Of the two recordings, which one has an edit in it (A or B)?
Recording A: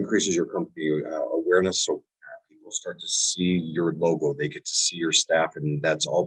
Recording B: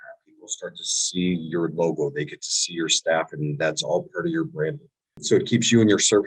B